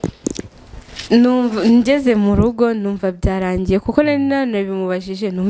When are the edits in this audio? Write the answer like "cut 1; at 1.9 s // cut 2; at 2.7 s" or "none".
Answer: none